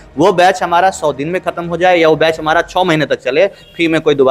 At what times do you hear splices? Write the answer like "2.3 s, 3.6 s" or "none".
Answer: none